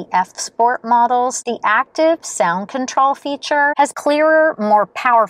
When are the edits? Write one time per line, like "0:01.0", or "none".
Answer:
0:01.5
0:03.9